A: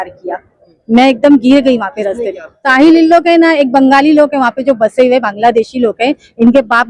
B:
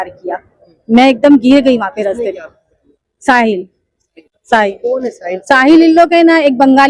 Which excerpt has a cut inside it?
A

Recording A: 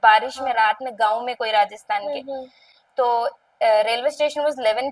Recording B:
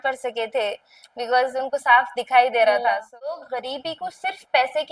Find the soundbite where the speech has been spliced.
B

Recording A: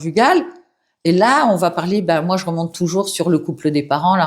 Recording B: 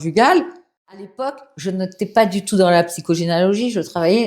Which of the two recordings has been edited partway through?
B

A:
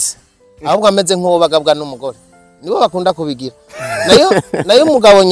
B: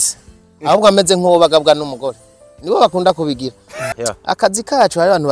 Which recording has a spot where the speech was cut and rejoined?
B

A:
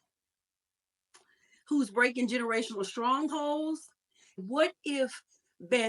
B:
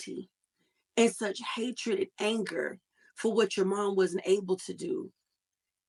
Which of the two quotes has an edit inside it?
A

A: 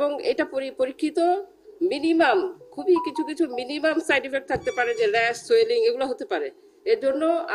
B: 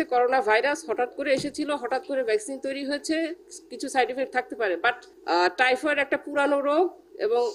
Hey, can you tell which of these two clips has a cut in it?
B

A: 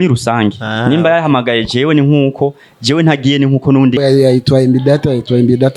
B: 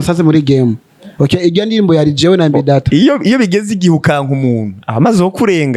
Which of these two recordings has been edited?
A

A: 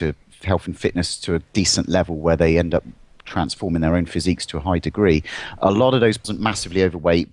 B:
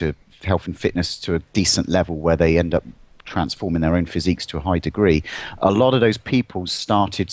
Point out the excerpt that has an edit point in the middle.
B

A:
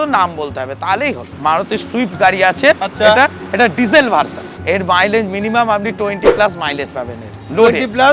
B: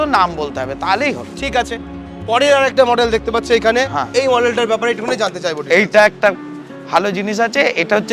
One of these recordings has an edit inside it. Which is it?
A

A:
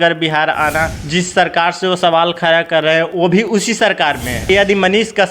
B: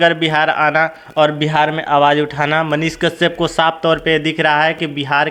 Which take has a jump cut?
A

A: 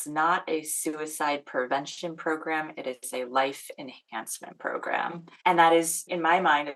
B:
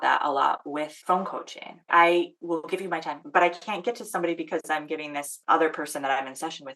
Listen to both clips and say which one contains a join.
B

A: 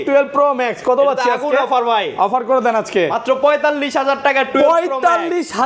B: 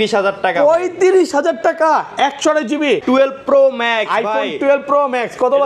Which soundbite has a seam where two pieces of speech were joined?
B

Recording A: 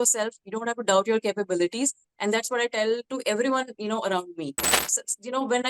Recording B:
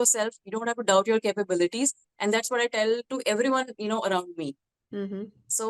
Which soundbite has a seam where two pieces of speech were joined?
A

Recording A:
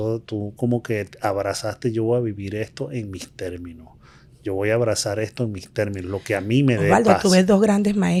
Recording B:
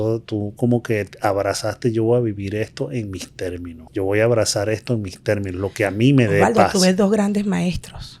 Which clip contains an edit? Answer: B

